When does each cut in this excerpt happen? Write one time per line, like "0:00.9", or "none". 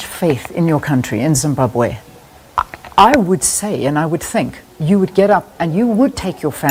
none